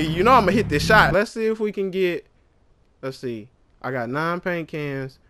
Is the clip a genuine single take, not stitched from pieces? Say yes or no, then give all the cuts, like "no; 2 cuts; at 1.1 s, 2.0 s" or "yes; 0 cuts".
no; 1 cut; at 1.1 s